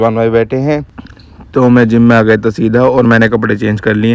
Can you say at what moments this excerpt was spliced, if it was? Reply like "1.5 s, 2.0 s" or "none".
1.0 s